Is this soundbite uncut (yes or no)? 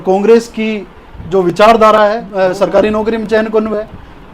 no